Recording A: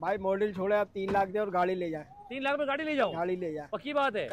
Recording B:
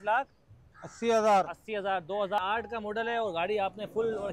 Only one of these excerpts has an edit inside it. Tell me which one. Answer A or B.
B